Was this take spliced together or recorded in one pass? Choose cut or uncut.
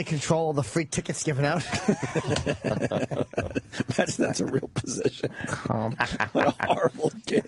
cut